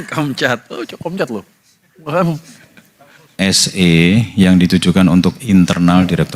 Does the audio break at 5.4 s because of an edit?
no; 1 cut; at 3.4 s

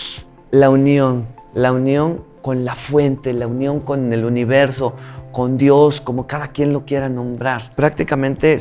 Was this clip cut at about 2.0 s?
no; 1 cut; at 7.7 s

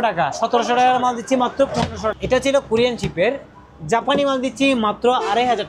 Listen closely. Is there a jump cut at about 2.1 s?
yes; 1 cut; at 2.1 s

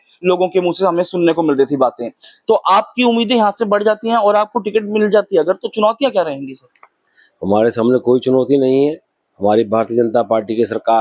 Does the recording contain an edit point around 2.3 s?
no; 0 cuts

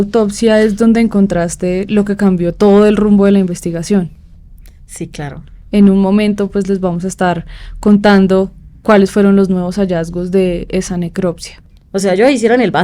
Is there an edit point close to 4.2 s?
no; 0 cuts

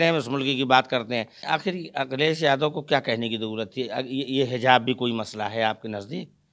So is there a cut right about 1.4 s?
yes; 1 cut; at 1.4 s

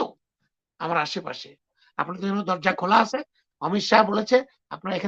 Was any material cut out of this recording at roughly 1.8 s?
yes; 1 cut; at 1.8 s

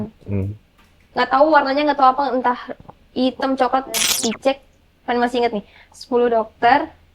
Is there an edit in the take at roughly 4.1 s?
yes; 1 cut; at 4.1 s

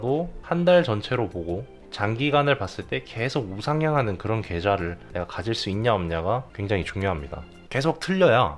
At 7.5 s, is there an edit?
yes; 1 cut; at 7.5 s

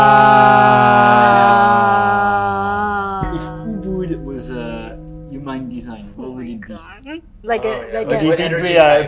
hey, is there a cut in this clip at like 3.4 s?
yes; 1 cut; at 3.4 s

